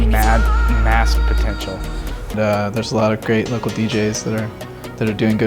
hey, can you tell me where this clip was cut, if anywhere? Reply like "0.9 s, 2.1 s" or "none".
2.3 s

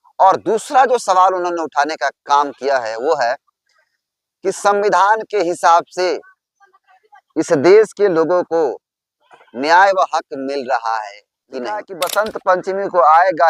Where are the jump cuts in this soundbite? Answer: 11.9 s

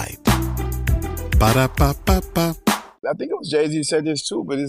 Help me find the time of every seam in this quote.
3.0 s

